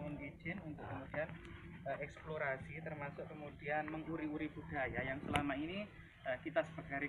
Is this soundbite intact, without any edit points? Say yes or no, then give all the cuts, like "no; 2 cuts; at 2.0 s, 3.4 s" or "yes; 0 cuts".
yes; 0 cuts